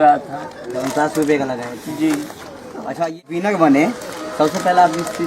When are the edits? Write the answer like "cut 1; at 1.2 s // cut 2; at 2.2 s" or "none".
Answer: cut 1; at 3.0 s